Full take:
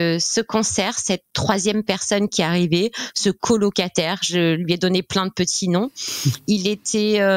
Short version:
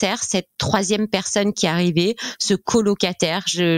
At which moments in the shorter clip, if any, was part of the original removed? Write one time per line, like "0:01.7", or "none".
none

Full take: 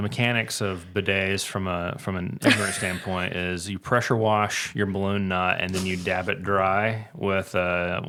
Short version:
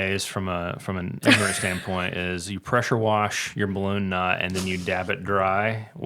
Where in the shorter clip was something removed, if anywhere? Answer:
none

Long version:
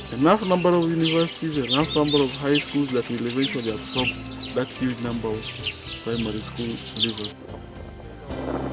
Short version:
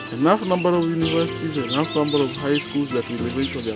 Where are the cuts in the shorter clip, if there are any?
none

